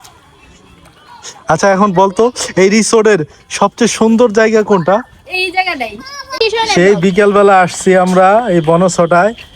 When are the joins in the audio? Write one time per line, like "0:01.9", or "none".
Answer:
0:06.3

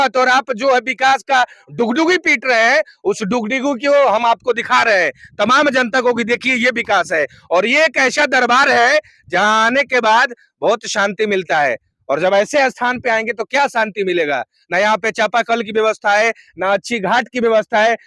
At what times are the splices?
none

